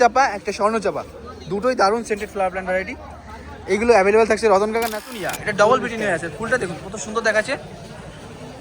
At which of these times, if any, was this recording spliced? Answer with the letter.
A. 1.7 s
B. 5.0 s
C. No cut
B